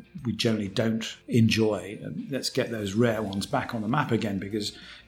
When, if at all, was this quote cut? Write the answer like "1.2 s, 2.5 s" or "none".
1.1 s